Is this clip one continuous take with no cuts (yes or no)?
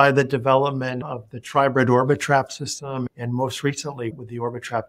no